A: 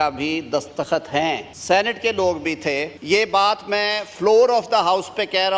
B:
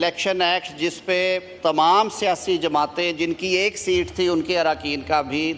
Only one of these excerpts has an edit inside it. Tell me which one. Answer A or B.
A